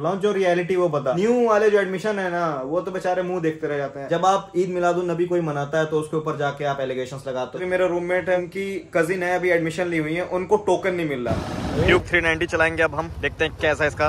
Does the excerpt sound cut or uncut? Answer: cut